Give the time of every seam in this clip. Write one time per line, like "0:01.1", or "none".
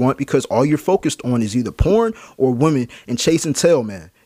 none